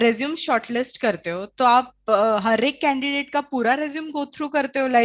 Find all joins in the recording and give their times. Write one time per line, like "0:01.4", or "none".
none